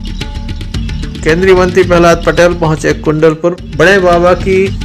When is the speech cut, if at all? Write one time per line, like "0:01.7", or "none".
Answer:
none

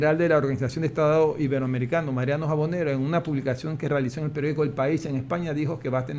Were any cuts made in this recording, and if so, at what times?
none

